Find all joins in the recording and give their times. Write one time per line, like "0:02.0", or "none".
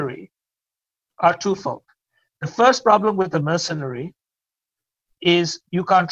none